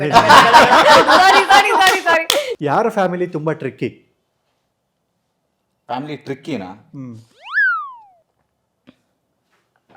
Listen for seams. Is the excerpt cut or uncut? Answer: cut